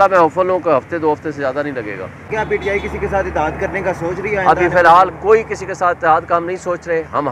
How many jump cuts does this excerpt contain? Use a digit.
1